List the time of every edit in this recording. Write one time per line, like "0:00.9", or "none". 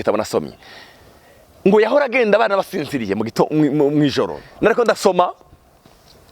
0:04.4